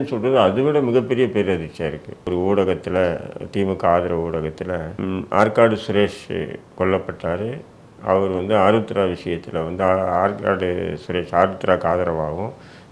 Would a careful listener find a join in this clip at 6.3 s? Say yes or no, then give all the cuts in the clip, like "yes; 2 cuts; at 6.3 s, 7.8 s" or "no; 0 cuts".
no; 2 cuts; at 2.3 s, 4.9 s